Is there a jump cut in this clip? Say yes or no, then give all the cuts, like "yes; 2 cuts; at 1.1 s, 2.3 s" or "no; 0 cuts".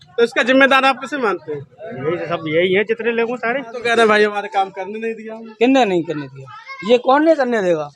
yes; 1 cut; at 3.8 s